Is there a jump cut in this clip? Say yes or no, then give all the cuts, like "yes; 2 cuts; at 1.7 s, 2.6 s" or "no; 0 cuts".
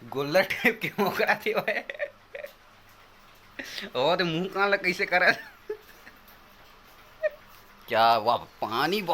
yes; 1 cut; at 7.5 s